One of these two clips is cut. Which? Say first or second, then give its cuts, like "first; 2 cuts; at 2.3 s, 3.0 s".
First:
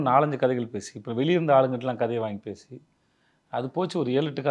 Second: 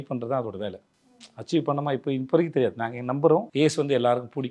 second; 1 cut; at 3.5 s